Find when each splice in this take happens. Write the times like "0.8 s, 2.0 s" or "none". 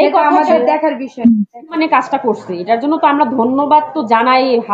1.8 s

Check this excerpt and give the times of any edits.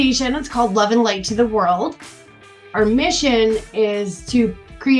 2.5 s

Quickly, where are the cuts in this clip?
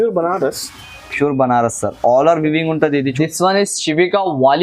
3.1 s

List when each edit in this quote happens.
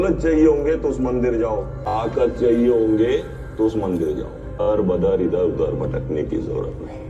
none

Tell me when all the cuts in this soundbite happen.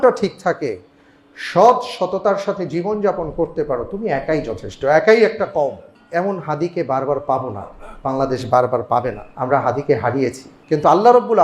6.0 s, 9.3 s, 10.5 s

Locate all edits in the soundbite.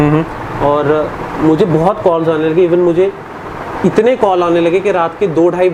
none

